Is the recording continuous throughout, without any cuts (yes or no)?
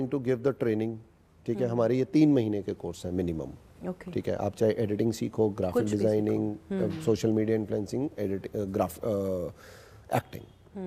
yes